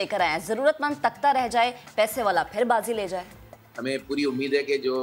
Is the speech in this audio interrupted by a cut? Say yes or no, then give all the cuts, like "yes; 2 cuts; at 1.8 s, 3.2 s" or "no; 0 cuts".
yes; 1 cut; at 3.7 s